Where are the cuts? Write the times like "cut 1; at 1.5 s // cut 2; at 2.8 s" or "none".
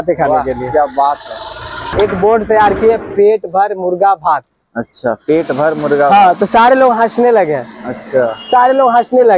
cut 1; at 1.8 s